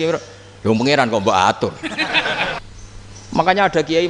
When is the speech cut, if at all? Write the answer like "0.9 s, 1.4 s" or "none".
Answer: 2.6 s